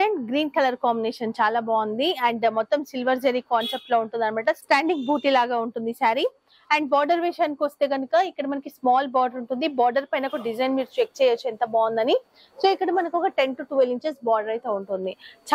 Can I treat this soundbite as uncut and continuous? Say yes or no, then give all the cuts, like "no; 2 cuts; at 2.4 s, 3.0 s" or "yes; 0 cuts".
yes; 0 cuts